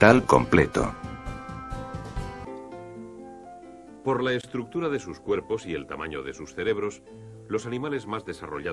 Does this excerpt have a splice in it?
no; 0 cuts

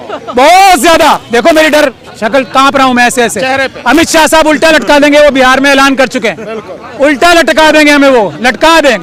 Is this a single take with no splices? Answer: yes; 0 cuts

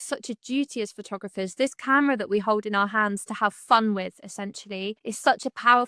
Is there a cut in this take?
no; 0 cuts

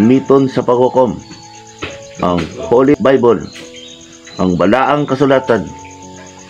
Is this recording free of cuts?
no; 1 cut; at 3.0 s

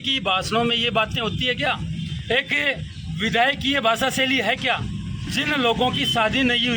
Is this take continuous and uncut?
no; 1 cut; at 5.3 s

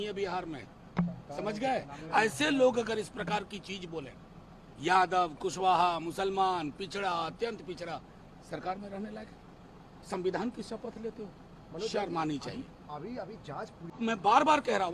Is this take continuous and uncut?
no; 1 cut; at 14.0 s

